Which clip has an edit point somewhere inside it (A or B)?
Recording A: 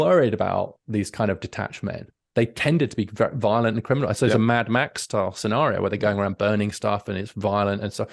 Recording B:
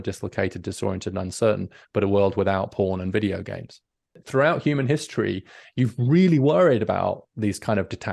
B